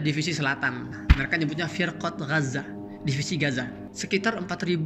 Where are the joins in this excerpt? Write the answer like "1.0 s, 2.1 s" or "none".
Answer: 0.9 s, 3.8 s